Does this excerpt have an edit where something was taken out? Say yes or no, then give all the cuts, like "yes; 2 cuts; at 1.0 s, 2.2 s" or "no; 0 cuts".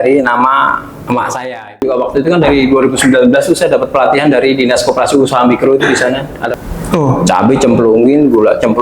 yes; 2 cuts; at 1.8 s, 6.4 s